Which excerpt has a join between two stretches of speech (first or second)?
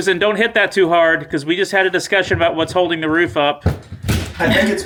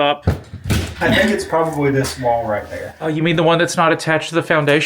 second